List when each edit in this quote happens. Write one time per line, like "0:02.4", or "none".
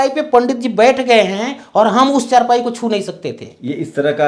none

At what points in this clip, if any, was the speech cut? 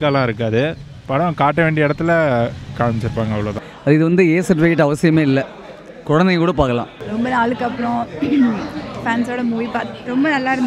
0:03.7
0:07.0

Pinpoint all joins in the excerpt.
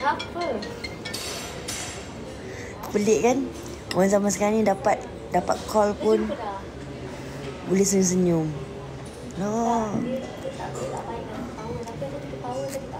none

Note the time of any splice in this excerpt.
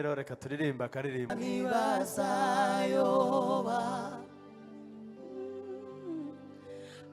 0:01.3

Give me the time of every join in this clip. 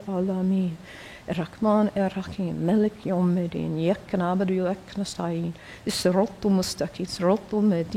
none

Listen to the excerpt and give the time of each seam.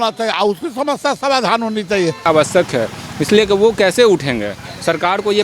0:02.3

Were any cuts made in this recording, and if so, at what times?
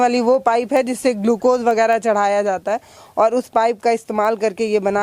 none

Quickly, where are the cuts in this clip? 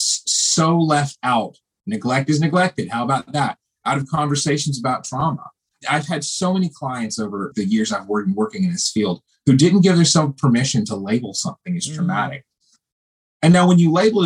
0:05.8
0:07.5

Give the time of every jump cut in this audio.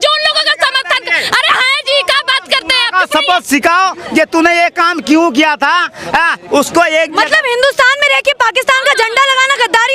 none

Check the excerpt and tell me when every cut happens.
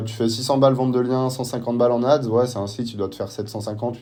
none

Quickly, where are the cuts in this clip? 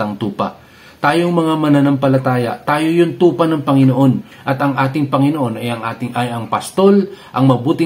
none

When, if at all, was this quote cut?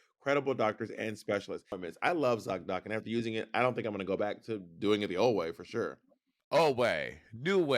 0:01.7

